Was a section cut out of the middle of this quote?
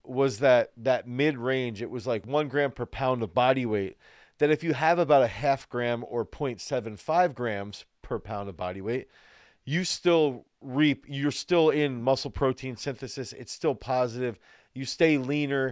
yes; 1 cut; at 2.2 s

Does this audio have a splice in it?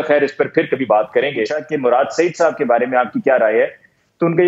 yes; 1 cut; at 1.6 s

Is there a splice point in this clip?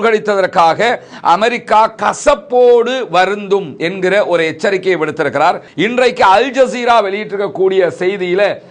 yes; 1 cut; at 5.7 s

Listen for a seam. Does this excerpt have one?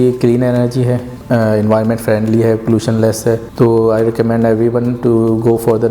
yes; 2 cuts; at 1.1 s, 3.5 s

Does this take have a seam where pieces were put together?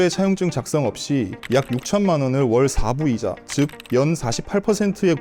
no; 0 cuts

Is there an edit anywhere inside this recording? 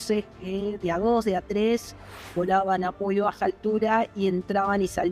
no; 0 cuts

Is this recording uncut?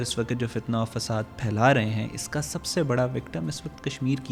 yes; 0 cuts

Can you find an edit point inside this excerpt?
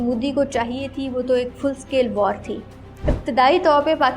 yes; 1 cut; at 2.8 s

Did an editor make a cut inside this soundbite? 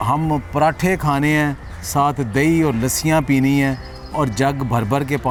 no; 0 cuts

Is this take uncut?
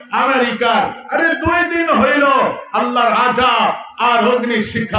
yes; 0 cuts

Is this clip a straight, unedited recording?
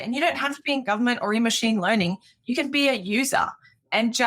yes; 0 cuts

